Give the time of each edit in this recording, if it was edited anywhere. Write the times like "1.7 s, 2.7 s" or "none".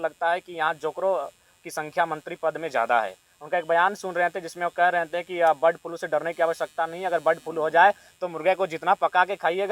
none